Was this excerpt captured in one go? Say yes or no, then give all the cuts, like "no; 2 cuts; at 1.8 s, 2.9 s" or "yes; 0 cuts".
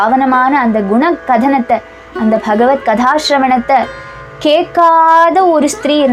yes; 0 cuts